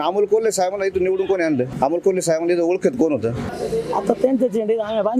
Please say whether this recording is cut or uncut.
cut